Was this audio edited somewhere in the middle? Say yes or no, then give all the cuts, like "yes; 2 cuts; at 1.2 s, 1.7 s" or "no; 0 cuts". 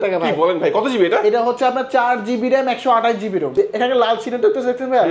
yes; 1 cut; at 3.5 s